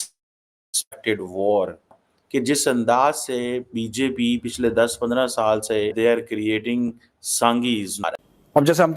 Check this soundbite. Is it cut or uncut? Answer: cut